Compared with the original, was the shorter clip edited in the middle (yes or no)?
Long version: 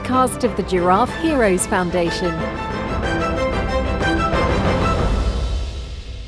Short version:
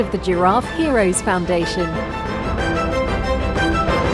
no